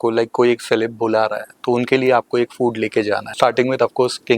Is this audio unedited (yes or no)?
no